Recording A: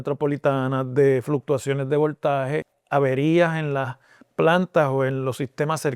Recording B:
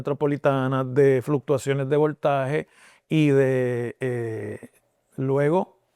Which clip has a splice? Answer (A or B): A